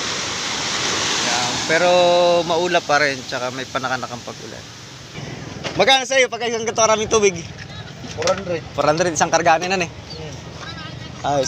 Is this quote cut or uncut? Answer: cut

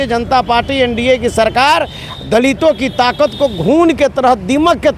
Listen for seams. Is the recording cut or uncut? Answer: uncut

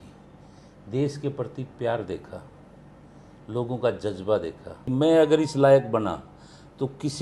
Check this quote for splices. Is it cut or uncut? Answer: cut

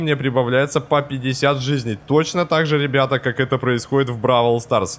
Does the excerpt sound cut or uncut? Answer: uncut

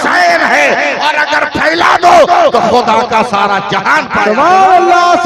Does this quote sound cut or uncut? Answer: uncut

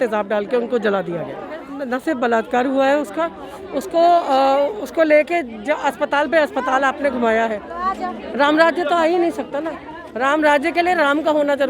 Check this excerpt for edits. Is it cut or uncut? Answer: cut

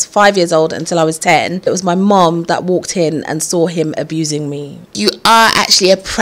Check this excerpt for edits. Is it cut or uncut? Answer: cut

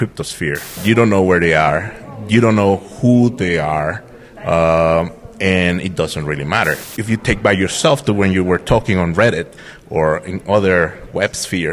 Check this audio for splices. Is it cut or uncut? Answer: cut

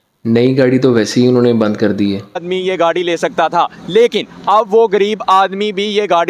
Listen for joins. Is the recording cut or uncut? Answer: cut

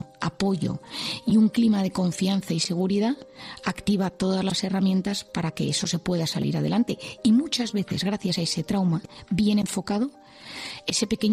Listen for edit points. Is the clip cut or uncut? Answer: uncut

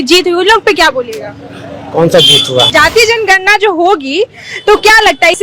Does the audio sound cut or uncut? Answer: cut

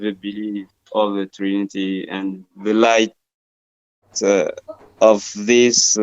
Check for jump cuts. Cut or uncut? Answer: cut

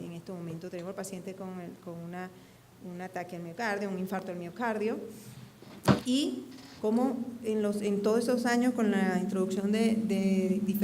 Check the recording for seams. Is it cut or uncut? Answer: cut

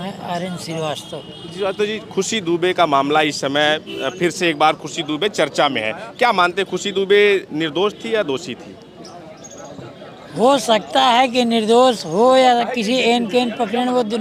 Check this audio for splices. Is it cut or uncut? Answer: uncut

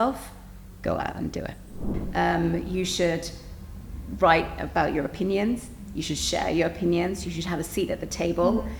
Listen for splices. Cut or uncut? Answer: cut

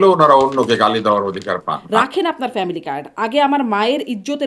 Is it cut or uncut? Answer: cut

